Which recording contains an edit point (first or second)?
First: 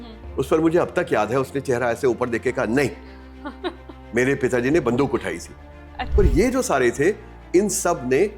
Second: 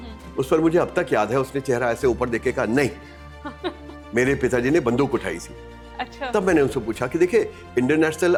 first